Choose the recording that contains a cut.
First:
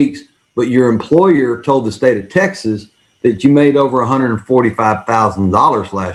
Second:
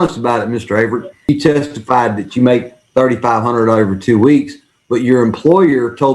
second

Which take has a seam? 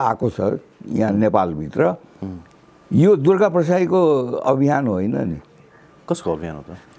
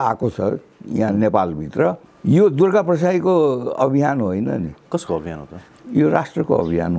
second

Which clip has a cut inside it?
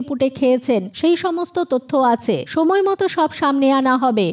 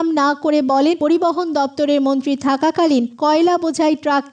first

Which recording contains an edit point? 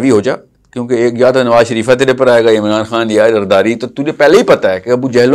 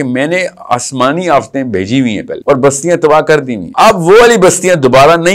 second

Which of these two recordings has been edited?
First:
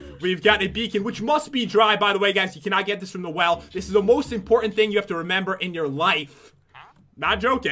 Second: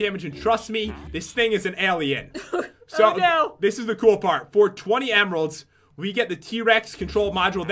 second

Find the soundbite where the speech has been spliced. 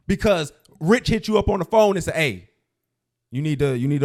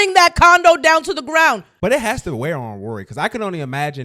second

